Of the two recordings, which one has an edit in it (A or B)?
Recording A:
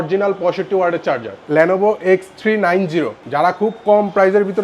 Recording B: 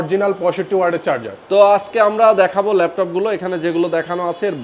A